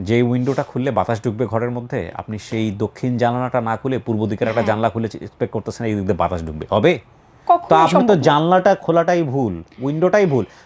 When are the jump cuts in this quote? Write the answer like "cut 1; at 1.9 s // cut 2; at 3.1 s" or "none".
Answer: none